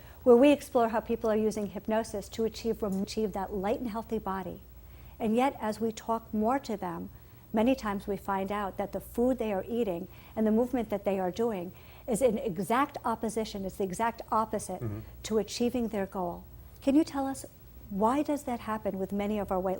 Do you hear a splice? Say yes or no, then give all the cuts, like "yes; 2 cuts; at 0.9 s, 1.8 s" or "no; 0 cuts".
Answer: no; 0 cuts